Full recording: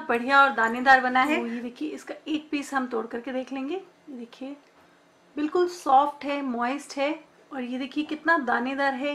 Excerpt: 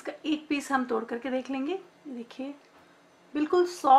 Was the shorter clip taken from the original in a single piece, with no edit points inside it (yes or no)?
yes